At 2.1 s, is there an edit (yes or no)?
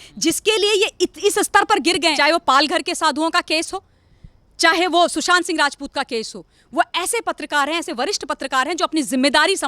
yes